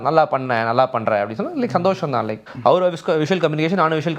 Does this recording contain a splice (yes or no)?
yes